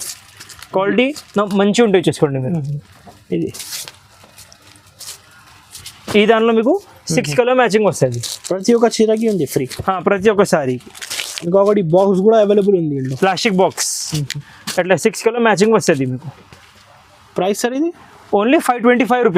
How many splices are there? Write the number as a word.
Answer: zero